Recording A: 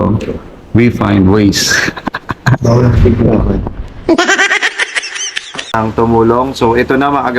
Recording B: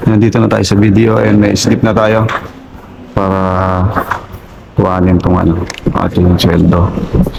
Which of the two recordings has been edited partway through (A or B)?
A